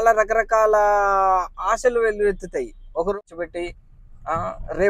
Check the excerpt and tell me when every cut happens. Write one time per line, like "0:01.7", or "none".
0:03.2